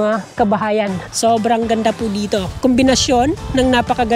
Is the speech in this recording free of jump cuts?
no; 2 cuts; at 1.1 s, 2.5 s

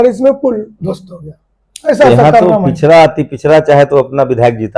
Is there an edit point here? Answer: no; 0 cuts

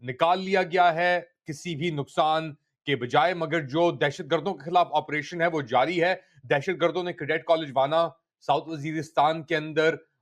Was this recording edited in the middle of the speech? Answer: no; 0 cuts

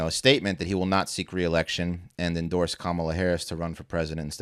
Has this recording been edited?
no; 0 cuts

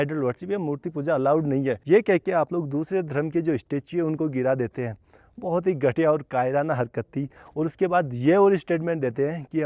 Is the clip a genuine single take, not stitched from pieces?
yes; 0 cuts

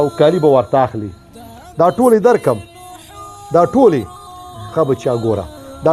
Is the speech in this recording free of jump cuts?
yes; 0 cuts

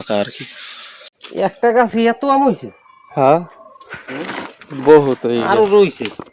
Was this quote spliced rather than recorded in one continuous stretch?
yes; 1 cut; at 1.4 s

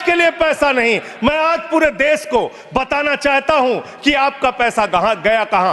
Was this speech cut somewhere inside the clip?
no; 0 cuts

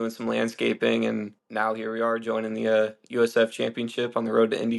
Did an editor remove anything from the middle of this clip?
yes; 1 cut; at 1.4 s

